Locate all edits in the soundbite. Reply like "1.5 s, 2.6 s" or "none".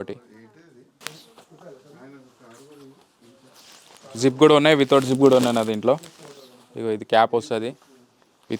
1.0 s